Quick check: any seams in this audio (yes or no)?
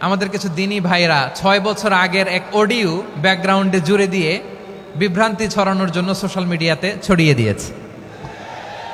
no